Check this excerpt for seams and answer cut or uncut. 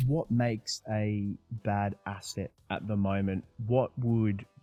uncut